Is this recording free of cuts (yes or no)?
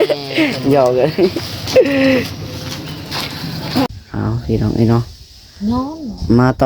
no